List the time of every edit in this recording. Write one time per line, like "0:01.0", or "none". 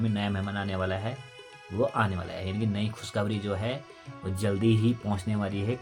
none

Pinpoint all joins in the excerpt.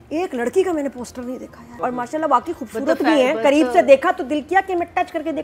0:01.6

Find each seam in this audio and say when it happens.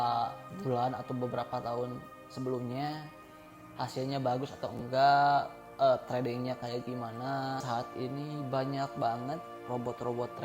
0:07.6

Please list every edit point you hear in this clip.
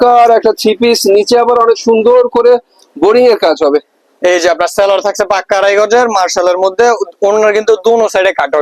none

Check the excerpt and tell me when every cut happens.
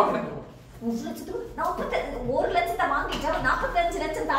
none

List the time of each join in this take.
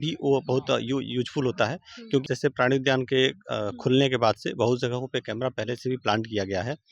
0:02.2

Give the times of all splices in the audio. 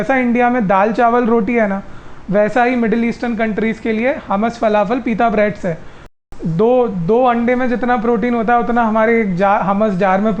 0:06.2

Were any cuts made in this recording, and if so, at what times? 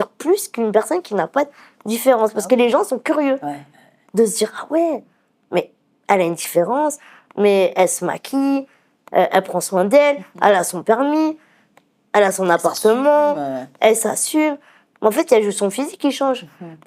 none

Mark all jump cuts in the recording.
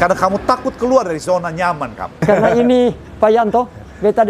0:02.2

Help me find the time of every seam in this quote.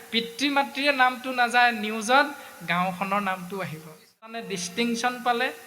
0:04.5

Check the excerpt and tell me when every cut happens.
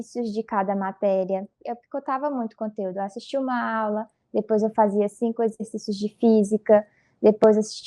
0:01.6

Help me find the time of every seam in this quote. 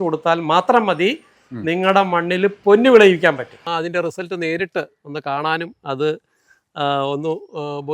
0:03.6

